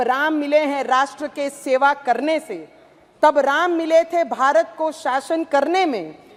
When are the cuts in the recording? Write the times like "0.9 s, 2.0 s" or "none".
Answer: none